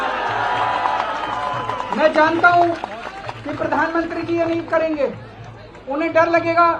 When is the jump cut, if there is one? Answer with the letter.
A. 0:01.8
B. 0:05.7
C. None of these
C